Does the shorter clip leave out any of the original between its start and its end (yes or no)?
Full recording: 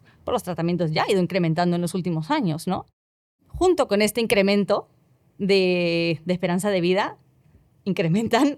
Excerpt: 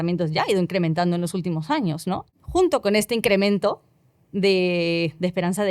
yes